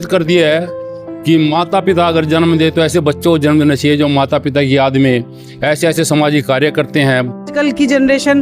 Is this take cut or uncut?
cut